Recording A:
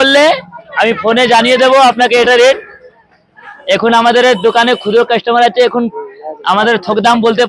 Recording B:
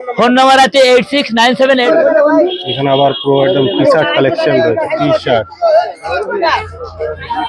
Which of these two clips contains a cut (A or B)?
B